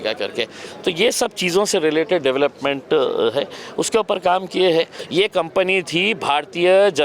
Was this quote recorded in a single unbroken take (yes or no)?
no